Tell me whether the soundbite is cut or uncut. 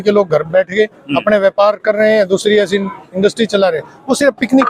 uncut